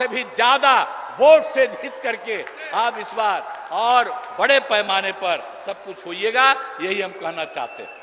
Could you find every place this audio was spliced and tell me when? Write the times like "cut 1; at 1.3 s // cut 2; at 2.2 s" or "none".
none

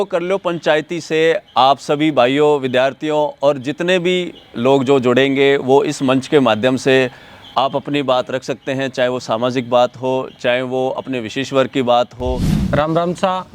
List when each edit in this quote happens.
cut 1; at 12.5 s

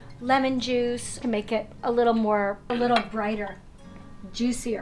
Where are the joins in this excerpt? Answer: cut 1; at 1.2 s // cut 2; at 2.7 s

